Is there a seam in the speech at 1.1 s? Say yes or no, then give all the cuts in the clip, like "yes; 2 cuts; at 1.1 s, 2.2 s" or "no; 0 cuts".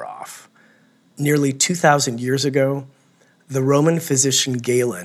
yes; 1 cut; at 1.1 s